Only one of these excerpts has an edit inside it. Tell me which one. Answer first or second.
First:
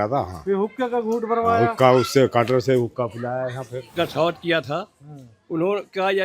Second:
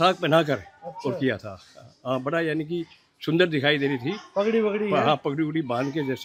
first